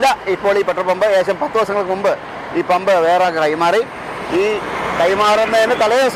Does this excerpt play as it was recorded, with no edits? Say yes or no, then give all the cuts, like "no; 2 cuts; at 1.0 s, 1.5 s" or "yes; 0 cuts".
yes; 0 cuts